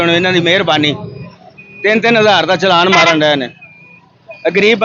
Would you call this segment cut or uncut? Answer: uncut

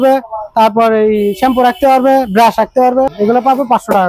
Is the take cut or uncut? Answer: cut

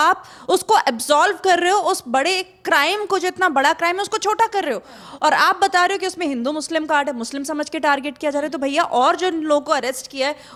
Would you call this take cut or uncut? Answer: uncut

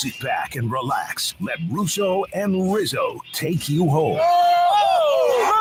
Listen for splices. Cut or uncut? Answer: uncut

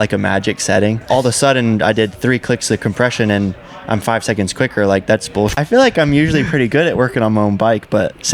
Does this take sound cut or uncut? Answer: cut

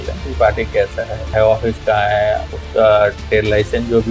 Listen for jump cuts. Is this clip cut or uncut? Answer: cut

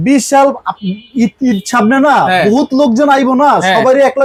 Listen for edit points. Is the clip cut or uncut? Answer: uncut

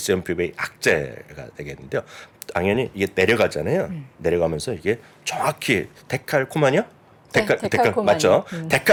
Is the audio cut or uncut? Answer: uncut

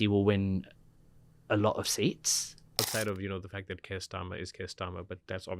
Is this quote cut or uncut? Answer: cut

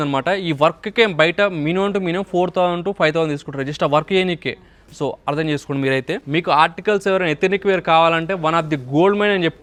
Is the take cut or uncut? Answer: uncut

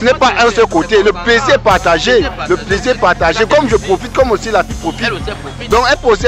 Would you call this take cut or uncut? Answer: uncut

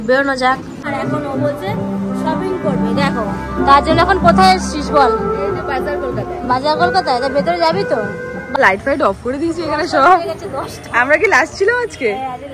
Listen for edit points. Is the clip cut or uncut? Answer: cut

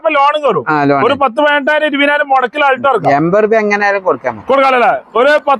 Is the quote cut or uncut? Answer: uncut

